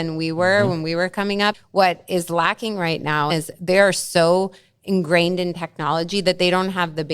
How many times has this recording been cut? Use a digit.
2